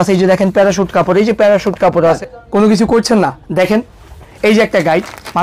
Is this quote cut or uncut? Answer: cut